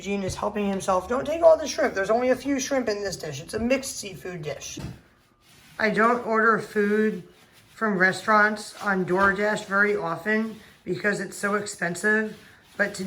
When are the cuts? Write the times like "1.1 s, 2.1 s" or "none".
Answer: 4.7 s